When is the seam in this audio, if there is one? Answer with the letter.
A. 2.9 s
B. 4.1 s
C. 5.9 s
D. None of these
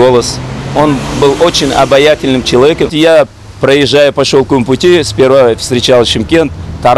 D